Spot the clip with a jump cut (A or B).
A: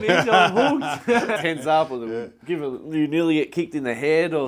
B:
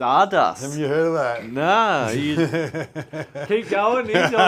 A